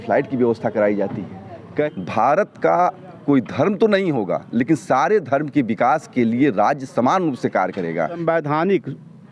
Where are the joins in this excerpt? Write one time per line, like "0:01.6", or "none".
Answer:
0:01.6
0:08.2